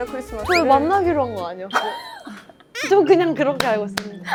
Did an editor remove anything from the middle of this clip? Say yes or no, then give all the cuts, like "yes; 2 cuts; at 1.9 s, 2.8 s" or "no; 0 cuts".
no; 0 cuts